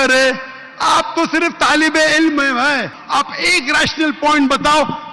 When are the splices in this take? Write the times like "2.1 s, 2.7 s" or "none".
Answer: 3.0 s